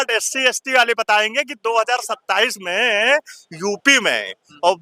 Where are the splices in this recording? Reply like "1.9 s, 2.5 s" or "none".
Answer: none